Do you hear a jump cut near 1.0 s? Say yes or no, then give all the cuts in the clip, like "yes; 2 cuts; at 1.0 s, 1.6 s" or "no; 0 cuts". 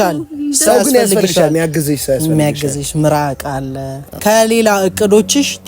no; 1 cut; at 4.2 s